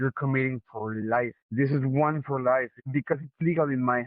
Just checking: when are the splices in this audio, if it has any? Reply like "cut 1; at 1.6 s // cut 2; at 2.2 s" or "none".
cut 1; at 1.4 s // cut 2; at 2.8 s